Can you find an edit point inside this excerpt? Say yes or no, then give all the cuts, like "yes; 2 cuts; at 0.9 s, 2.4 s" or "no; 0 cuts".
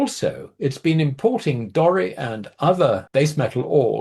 yes; 1 cut; at 3.0 s